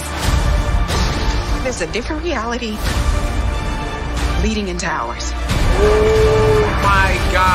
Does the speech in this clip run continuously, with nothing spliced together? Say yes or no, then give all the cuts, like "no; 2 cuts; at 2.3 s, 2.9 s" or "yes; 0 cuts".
yes; 0 cuts